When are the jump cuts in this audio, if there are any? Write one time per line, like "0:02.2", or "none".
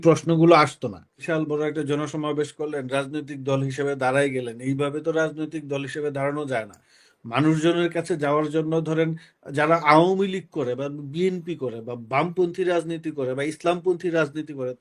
0:01.1